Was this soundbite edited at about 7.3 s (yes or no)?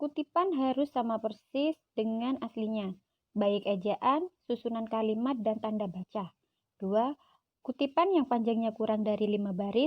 yes